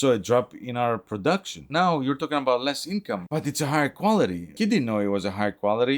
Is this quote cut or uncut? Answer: cut